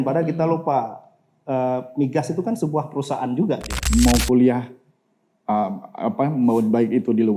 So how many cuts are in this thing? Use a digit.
1